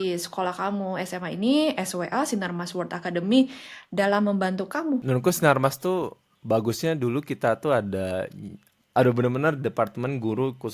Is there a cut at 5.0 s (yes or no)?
yes